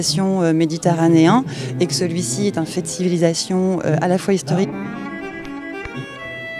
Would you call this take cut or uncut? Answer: uncut